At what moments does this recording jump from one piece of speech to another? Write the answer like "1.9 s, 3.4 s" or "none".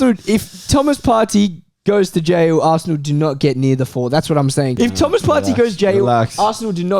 4.7 s